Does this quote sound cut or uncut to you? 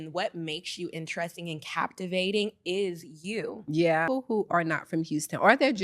cut